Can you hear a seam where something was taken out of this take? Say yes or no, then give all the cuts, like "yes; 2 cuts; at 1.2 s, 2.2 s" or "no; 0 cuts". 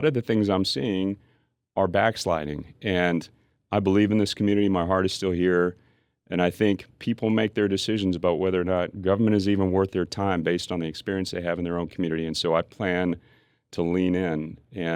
no; 0 cuts